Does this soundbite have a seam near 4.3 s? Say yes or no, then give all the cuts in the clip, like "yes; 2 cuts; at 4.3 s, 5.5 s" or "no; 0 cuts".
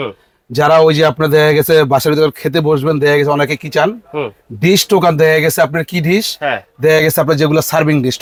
no; 0 cuts